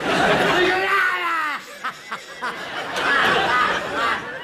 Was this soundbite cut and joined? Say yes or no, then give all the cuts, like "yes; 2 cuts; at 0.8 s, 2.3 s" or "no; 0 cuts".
no; 0 cuts